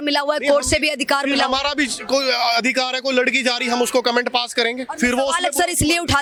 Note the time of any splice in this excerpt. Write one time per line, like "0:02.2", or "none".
none